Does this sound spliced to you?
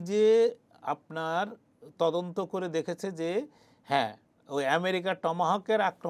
no; 0 cuts

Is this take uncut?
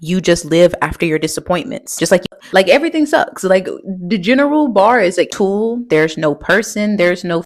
no; 2 cuts; at 2.3 s, 5.3 s

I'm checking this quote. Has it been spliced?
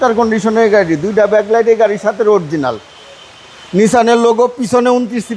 no; 0 cuts

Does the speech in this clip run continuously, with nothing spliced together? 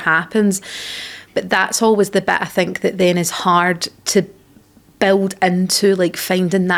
yes; 0 cuts

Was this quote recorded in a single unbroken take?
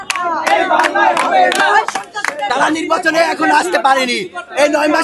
no; 1 cut; at 2.5 s

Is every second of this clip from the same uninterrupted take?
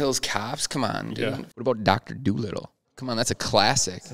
no; 1 cut; at 1.2 s

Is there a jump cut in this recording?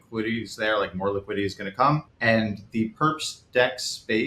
yes; 1 cut; at 2.1 s

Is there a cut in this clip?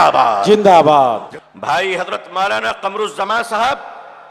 yes; 1 cut; at 1.3 s

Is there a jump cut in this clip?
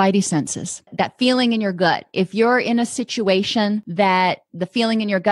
yes; 2 cuts; at 0.9 s, 3.9 s

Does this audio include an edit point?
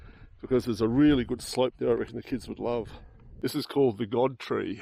no; 0 cuts

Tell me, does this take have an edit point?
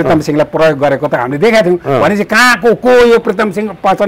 no; 0 cuts

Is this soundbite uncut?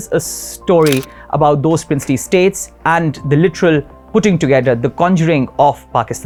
yes; 0 cuts

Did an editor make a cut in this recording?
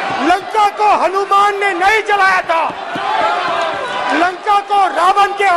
no; 0 cuts

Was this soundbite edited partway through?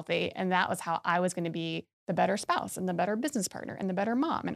no; 0 cuts

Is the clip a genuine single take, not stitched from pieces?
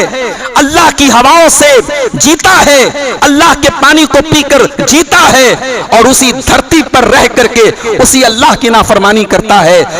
yes; 0 cuts

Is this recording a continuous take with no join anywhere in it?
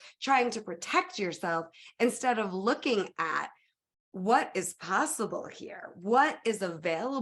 yes; 0 cuts

